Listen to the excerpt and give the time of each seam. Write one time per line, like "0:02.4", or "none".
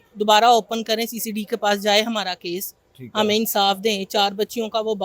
none